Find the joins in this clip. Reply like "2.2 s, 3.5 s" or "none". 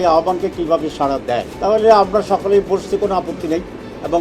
1.5 s